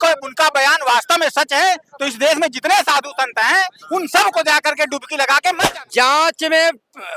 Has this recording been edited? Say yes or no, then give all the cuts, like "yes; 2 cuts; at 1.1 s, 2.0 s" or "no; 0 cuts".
yes; 1 cut; at 5.7 s